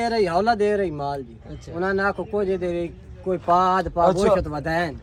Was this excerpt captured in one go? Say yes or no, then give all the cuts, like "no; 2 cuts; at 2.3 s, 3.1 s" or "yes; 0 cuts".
yes; 0 cuts